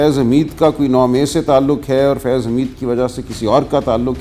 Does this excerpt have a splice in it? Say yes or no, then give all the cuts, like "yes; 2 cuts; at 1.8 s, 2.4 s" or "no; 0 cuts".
no; 0 cuts